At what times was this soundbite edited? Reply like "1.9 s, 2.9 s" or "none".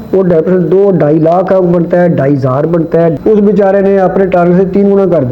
3.2 s

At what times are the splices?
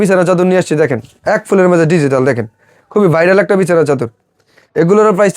none

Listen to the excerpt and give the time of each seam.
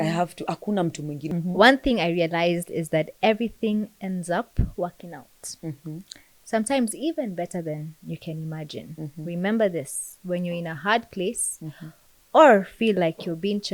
1.2 s

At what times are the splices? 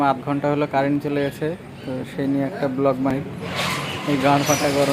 3.1 s

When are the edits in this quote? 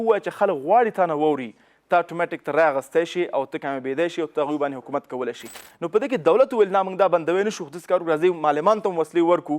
5.6 s

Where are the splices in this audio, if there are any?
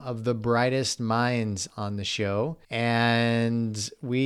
2.6 s

